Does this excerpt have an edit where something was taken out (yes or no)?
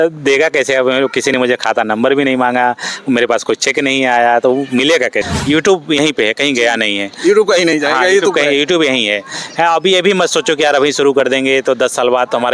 yes